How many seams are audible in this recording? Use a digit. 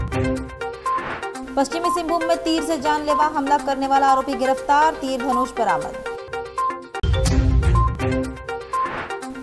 0